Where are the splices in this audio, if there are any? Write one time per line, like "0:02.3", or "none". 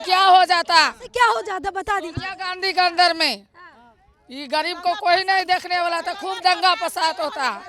none